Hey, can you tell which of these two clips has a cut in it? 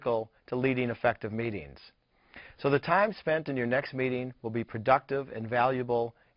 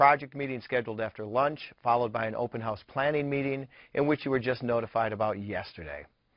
second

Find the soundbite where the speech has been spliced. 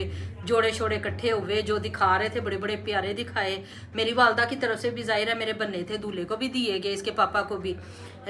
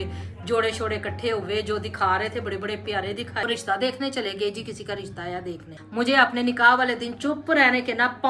second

